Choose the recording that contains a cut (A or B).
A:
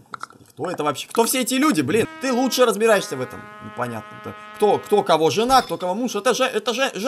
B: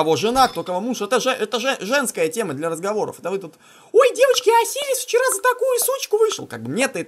A